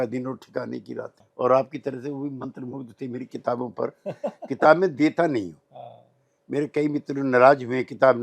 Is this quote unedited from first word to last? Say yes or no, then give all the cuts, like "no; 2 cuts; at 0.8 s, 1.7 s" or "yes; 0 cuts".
no; 1 cut; at 1.2 s